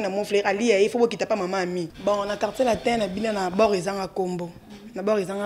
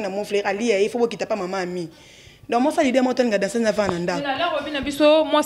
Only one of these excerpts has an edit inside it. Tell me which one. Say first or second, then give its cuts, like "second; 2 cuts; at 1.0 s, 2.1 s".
first; 1 cut; at 1.9 s